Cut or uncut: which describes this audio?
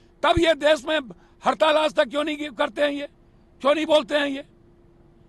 uncut